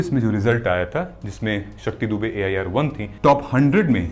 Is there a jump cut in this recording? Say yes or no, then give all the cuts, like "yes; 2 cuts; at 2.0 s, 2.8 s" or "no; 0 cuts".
yes; 1 cut; at 3.1 s